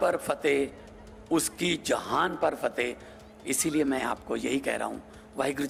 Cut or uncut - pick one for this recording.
uncut